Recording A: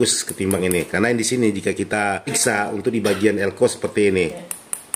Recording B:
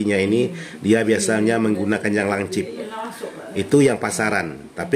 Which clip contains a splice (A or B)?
A